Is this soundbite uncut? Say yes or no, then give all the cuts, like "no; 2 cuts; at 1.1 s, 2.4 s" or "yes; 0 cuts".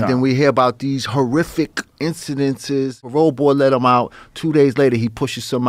no; 1 cut; at 3.0 s